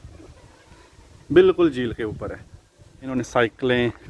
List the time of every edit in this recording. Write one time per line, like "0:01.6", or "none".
0:03.1